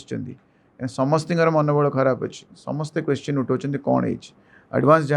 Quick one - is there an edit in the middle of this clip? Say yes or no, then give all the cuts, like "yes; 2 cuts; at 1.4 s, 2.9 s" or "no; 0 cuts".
no; 0 cuts